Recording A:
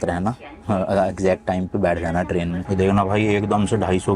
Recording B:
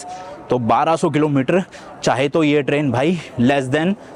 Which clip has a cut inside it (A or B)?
A